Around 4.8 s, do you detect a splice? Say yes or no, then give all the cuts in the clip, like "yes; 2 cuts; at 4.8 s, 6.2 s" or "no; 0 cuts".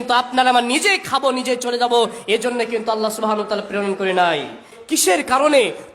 yes; 1 cut; at 4.8 s